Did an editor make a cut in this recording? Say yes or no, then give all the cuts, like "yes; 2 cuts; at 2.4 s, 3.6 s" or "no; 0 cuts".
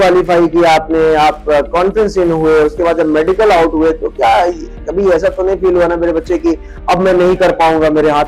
no; 0 cuts